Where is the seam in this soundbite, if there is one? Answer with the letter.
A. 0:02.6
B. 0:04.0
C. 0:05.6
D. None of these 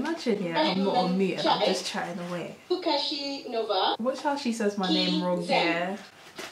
B